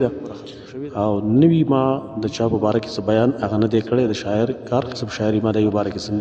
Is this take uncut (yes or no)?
yes